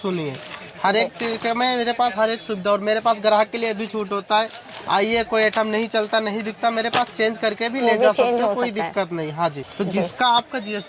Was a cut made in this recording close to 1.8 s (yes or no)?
no